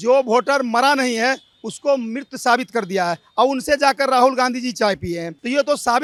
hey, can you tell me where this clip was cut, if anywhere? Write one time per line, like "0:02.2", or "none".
none